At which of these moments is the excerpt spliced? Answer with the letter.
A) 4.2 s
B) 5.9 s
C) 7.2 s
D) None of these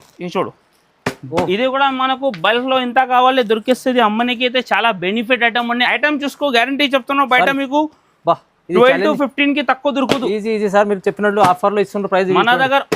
B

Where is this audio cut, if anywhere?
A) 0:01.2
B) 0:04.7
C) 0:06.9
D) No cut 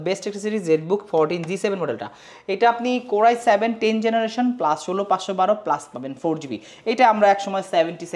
D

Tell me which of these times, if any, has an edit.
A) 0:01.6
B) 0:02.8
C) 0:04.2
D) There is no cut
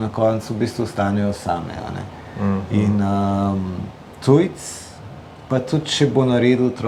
D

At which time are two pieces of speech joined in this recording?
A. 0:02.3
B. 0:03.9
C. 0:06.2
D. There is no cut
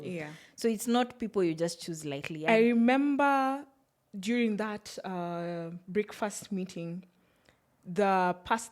A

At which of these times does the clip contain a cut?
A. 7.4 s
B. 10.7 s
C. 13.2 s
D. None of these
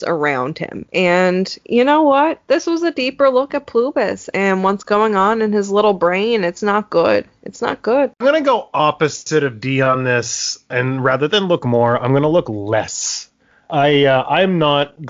B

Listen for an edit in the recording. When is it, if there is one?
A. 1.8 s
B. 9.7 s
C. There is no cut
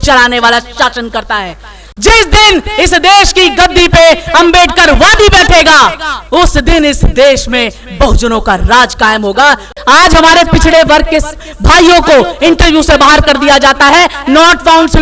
B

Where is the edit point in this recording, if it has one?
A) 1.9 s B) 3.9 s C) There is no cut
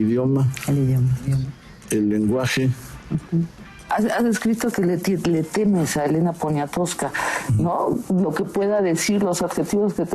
B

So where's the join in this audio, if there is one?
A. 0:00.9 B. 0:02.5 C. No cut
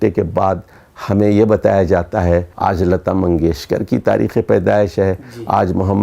B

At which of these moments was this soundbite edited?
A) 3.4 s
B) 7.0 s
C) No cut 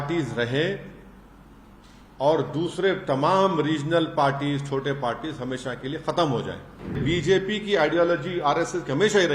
B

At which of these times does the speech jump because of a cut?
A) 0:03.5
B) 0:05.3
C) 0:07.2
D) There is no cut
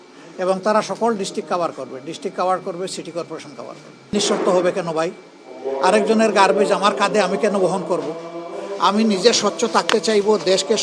A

